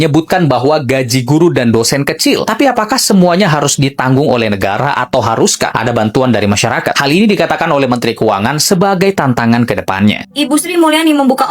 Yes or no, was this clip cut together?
yes